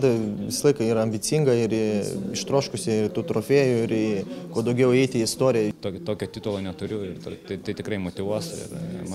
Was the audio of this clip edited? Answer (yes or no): yes